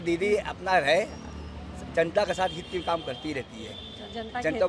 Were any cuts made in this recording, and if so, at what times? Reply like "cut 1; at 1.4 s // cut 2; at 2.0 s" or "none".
none